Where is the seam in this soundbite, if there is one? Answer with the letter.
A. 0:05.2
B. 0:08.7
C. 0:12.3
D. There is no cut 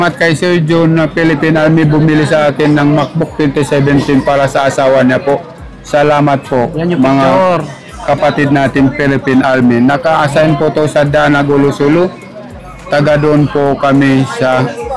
D